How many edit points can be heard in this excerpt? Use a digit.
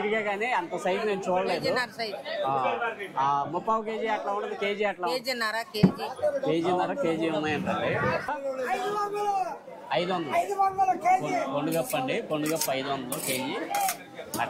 1